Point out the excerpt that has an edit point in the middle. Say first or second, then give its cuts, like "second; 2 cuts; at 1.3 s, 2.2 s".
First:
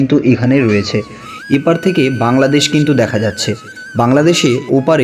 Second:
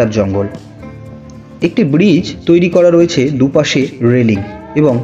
first; 1 cut; at 1.2 s